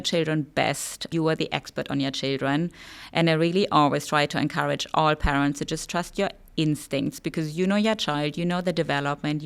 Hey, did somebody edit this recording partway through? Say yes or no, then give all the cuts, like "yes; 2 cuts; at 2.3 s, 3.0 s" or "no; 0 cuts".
yes; 1 cut; at 1.1 s